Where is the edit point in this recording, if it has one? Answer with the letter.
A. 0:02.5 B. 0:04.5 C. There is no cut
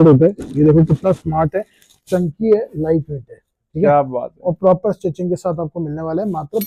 C